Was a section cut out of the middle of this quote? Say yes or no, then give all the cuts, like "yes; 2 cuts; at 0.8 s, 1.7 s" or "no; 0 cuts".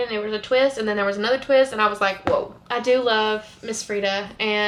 no; 0 cuts